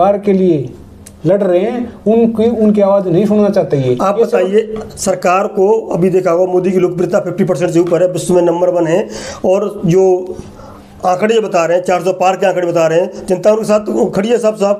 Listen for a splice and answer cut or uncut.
uncut